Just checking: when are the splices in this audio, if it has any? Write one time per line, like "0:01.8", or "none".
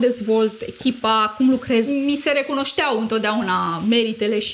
0:01.9